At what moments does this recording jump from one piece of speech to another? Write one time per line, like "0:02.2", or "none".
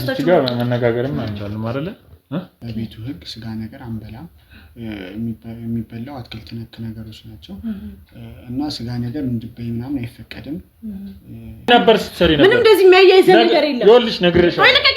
0:02.6
0:11.7